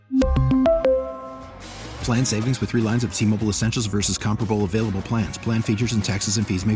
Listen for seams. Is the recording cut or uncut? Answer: uncut